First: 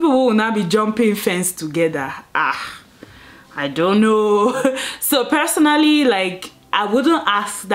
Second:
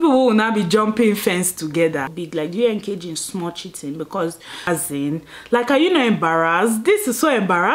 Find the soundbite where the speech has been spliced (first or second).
second